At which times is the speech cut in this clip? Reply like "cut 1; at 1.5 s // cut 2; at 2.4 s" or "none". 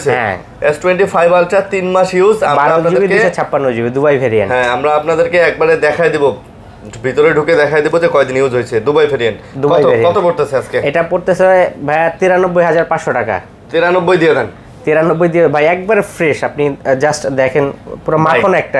none